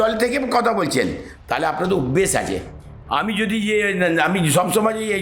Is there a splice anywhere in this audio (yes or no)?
no